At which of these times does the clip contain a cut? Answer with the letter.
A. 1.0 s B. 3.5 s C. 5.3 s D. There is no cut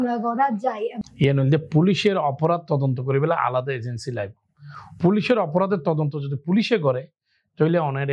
A